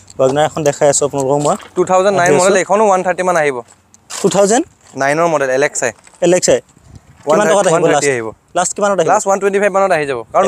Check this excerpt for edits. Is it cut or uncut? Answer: uncut